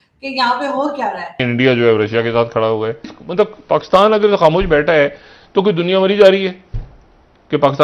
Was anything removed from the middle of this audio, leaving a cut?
yes; 2 cuts; at 1.4 s, 3.1 s

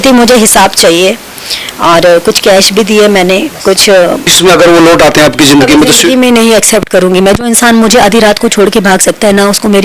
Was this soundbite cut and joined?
yes; 1 cut; at 4.3 s

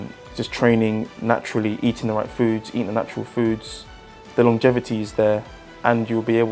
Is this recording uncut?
yes; 0 cuts

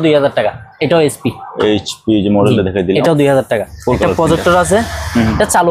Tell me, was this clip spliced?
yes; 1 cut; at 3.7 s

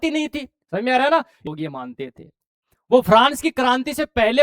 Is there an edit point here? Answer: yes; 1 cut; at 1.4 s

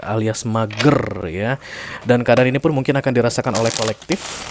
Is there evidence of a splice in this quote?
no; 0 cuts

